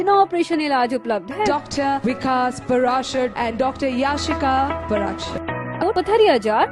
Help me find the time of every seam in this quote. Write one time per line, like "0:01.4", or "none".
0:05.8

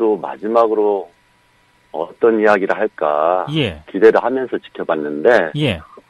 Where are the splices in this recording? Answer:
0:04.5

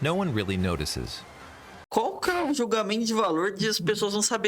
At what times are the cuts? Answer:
0:01.9

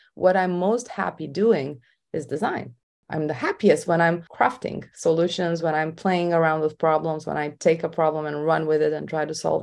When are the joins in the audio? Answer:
none

